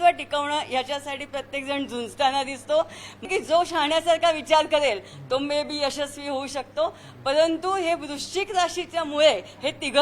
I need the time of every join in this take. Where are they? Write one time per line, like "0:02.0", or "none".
0:03.2